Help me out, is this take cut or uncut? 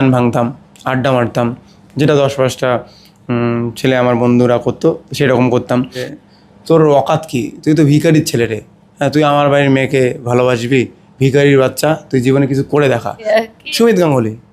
cut